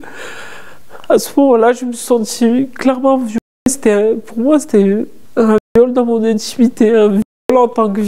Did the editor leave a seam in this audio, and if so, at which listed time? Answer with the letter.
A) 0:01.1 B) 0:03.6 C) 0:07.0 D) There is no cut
D